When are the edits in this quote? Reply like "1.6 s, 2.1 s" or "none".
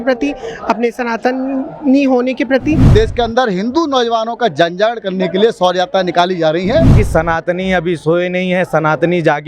2.9 s, 7.0 s